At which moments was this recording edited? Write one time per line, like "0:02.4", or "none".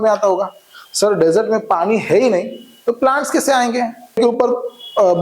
0:04.2